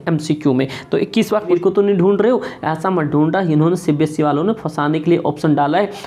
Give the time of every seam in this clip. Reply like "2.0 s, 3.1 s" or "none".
1.5 s